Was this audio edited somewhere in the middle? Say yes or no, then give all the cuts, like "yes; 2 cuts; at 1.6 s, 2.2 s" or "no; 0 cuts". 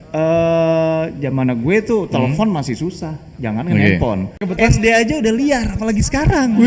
yes; 1 cut; at 4.5 s